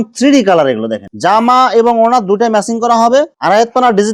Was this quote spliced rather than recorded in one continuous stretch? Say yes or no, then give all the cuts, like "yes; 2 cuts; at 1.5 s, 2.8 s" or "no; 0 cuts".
yes; 2 cuts; at 1.0 s, 3.3 s